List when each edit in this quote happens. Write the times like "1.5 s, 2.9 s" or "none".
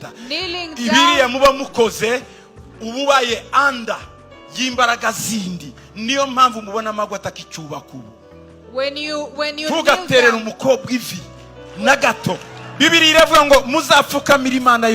12.6 s